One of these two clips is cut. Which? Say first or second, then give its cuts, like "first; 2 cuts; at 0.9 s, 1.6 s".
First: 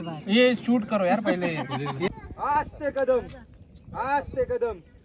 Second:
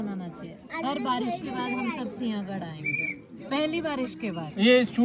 first; 1 cut; at 2.1 s